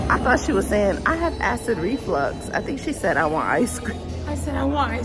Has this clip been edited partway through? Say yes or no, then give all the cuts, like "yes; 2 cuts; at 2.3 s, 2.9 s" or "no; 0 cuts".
no; 0 cuts